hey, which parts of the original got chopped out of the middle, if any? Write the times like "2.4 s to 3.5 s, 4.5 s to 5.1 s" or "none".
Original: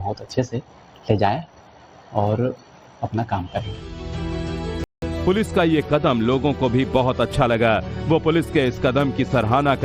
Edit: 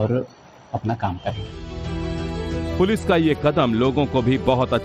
4.8 s to 5.0 s